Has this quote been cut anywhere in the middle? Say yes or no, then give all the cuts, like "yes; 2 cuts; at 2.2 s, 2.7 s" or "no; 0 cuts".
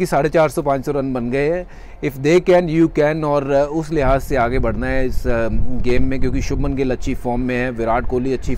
no; 0 cuts